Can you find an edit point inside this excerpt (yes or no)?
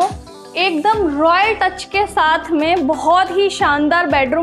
no